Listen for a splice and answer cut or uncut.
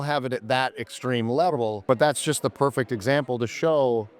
cut